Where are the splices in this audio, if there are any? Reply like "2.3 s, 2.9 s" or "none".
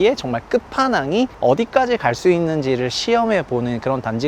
1.3 s

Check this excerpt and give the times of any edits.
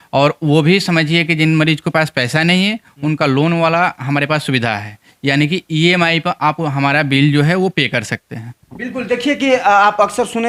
none

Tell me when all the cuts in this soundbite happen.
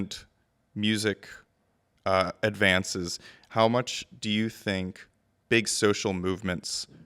none

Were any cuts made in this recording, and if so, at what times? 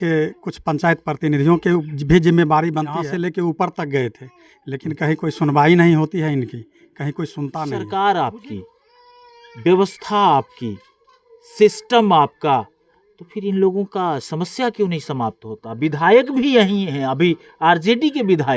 3.0 s, 7.7 s

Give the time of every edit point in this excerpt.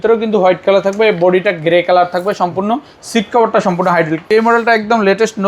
4.2 s

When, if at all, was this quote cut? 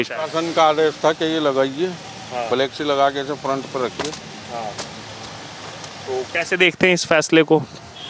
none

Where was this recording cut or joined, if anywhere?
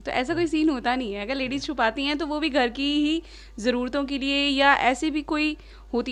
none

